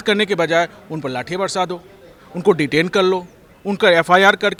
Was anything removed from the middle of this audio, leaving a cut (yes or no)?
no